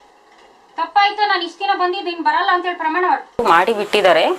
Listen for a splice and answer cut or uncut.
cut